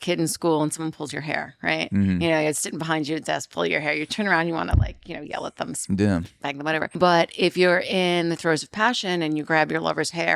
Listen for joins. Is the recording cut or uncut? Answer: cut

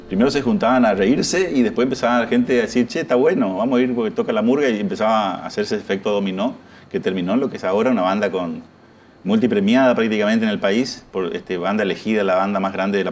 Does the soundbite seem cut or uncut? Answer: uncut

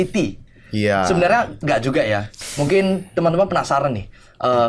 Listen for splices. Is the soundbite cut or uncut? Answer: cut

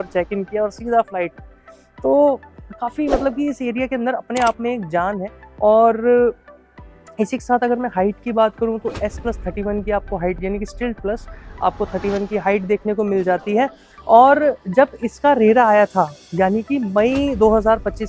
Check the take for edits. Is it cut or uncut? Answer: uncut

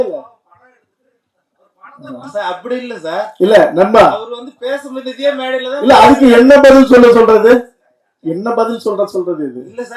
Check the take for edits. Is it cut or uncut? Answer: uncut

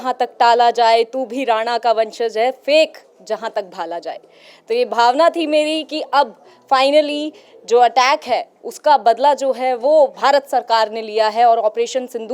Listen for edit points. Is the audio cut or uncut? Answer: uncut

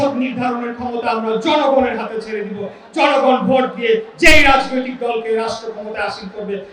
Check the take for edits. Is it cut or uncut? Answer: uncut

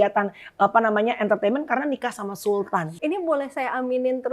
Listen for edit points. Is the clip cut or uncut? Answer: cut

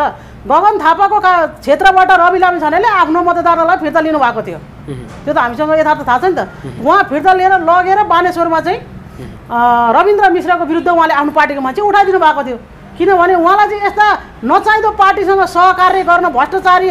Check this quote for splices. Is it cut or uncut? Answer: uncut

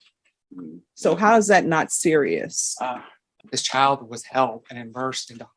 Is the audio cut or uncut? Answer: cut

